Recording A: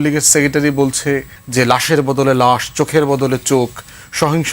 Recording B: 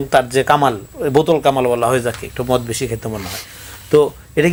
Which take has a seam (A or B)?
A